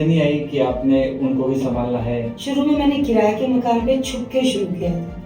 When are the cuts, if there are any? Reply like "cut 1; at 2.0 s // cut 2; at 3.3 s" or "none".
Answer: cut 1; at 2.4 s